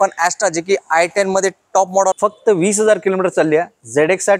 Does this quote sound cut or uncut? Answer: cut